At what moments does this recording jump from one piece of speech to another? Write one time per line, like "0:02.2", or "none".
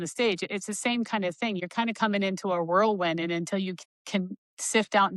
0:01.6